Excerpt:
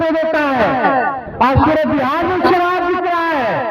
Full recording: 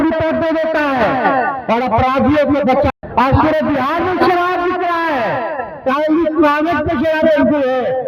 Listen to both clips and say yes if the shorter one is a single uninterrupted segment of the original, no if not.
no